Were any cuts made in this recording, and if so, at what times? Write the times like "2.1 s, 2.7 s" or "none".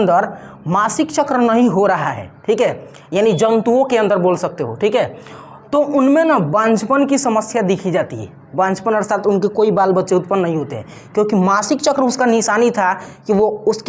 none

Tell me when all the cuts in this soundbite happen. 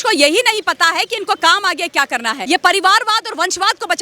2.4 s

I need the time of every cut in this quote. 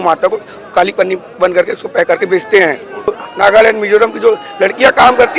3.2 s

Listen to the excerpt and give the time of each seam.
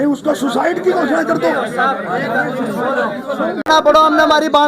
3.7 s

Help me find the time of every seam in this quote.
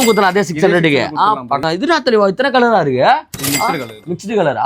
1.6 s

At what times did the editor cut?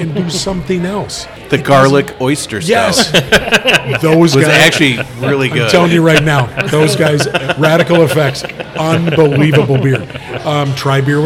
1.3 s

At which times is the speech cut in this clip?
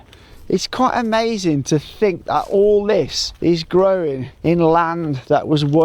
3.2 s, 4.3 s

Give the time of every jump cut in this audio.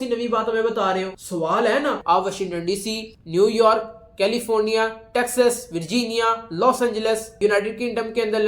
2.0 s, 7.4 s

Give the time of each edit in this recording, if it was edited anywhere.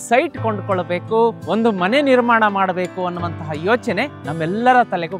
1.4 s, 4.2 s

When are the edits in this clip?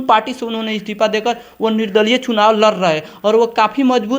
none

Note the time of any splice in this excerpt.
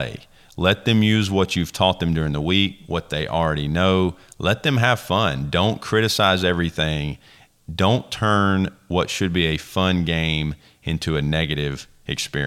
none

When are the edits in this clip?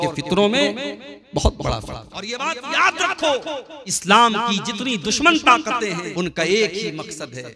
2.3 s, 4.0 s, 6.1 s

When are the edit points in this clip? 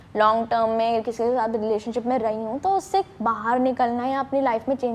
none

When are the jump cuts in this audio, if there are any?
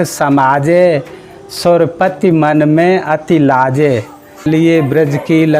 4.4 s

